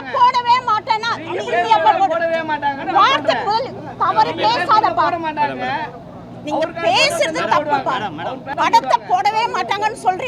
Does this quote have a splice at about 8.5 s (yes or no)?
yes